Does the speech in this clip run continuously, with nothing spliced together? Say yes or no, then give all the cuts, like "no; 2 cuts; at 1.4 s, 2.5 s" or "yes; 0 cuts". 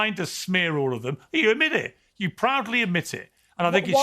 yes; 0 cuts